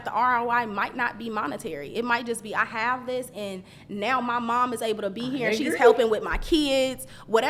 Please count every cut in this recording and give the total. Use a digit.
0